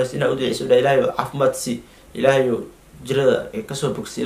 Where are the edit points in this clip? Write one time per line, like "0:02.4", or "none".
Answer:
none